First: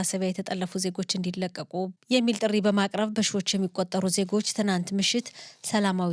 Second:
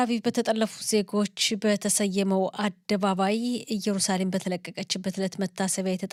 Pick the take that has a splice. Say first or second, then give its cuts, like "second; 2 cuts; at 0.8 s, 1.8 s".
first; 1 cut; at 1.9 s